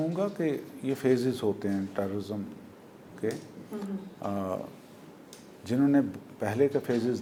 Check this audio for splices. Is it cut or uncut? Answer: uncut